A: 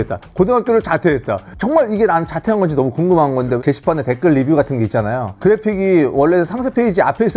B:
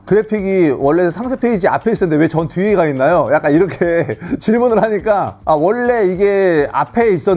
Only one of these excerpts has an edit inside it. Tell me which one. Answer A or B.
A